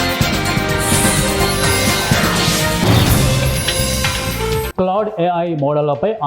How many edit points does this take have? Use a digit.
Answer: 1